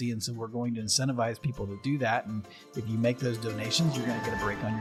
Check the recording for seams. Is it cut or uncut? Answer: uncut